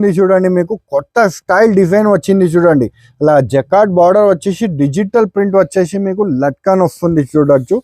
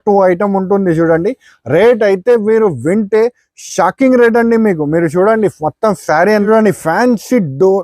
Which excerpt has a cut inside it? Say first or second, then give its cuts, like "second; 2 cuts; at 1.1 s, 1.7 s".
second; 1 cut; at 6.5 s